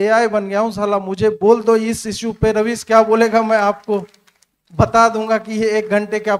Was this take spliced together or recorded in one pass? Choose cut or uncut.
uncut